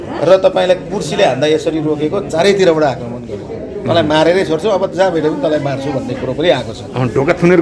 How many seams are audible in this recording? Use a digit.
0